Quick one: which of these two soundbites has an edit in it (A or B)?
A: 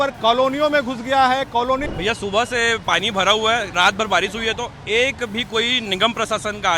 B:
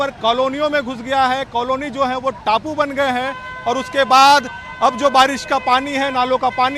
A